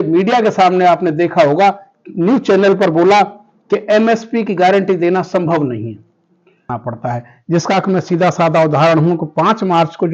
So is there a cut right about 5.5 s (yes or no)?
no